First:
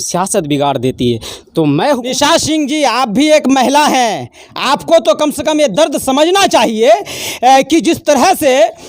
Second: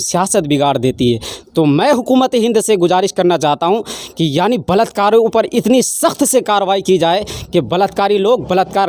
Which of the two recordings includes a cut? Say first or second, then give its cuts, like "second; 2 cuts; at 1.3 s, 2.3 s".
first; 1 cut; at 2.1 s